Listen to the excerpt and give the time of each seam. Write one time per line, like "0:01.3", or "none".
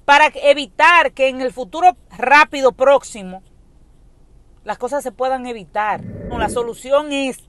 0:06.2